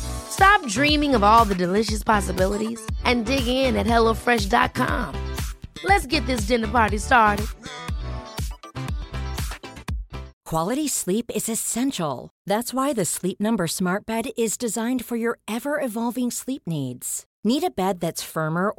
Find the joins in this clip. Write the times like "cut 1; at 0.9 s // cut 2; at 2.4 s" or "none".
cut 1; at 10.3 s